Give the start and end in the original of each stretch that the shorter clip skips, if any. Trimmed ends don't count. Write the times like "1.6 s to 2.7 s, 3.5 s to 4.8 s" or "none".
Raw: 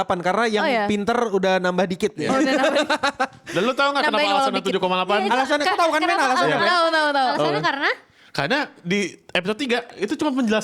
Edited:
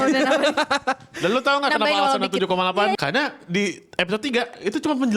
5.3 s to 8.3 s